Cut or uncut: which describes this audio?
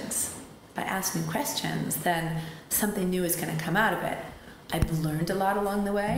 uncut